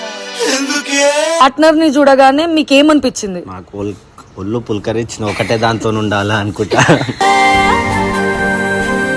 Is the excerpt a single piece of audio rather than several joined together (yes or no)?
no